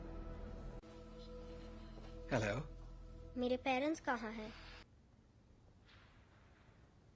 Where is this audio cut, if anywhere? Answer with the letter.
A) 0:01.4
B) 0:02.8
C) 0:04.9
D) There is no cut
C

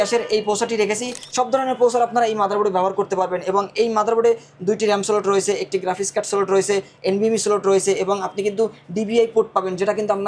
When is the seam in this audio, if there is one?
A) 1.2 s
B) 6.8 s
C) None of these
A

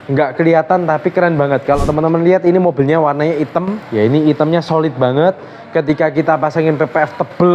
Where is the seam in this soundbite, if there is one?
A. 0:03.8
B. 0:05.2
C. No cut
A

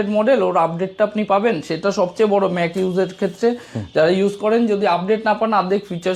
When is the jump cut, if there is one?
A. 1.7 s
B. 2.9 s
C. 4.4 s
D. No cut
D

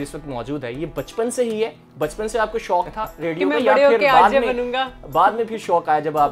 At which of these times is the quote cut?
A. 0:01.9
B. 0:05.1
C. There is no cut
C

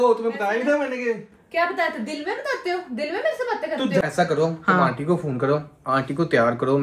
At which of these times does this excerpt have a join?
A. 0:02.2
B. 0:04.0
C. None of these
B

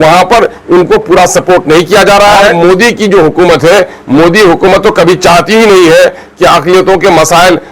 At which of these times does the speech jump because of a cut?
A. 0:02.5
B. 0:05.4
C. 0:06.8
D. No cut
A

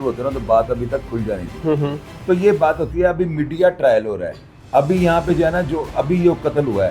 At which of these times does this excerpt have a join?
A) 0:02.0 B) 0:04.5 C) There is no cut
A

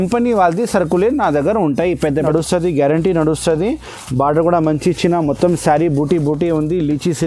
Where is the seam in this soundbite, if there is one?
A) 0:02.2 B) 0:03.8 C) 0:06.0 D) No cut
A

